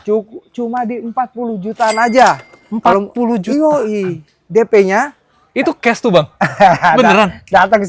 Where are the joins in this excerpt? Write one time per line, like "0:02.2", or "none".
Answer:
none

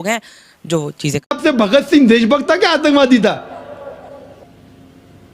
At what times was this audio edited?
0:01.4

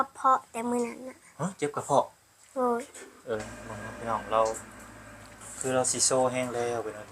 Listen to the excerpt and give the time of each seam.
0:03.4

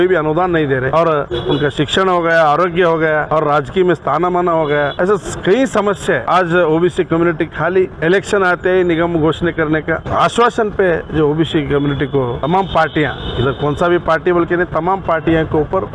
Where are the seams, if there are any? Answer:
0:00.9
0:03.2
0:04.9
0:06.2
0:07.9
0:10.0
0:12.4

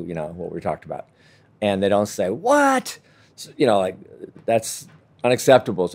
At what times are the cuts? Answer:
0:01.5

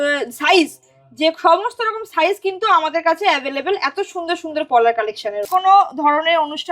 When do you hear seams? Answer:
0:05.5

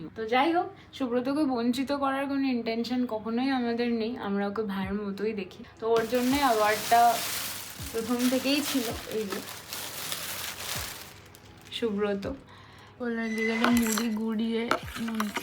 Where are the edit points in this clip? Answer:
0:13.0

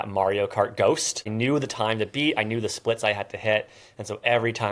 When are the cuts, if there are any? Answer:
0:01.3

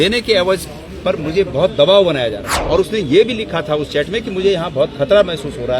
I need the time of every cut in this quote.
0:02.5

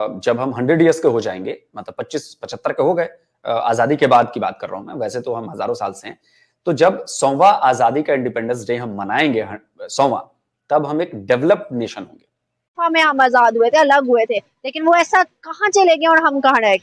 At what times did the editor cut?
0:12.8

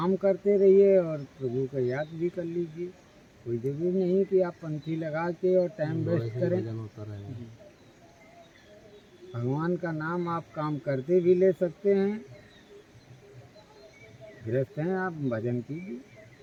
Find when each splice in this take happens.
none

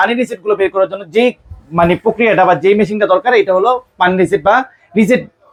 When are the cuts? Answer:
none

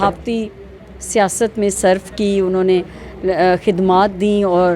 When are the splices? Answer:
none

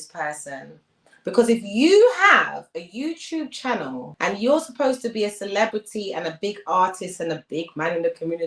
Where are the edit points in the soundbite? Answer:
0:04.1

